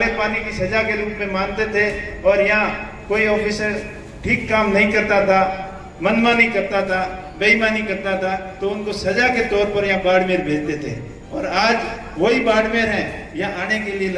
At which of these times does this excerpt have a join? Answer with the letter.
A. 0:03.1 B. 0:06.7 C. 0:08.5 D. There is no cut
D